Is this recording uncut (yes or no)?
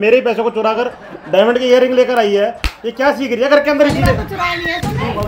yes